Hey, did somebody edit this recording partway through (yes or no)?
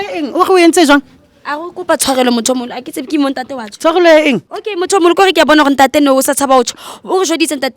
yes